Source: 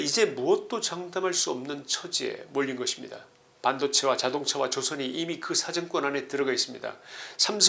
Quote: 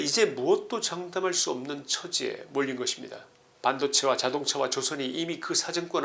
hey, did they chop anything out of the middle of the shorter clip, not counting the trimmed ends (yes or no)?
no